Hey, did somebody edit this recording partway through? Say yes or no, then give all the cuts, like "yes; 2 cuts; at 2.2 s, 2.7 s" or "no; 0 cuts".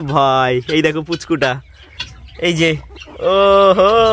no; 0 cuts